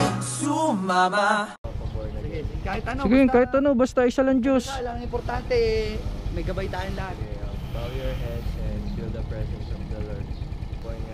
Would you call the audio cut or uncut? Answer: cut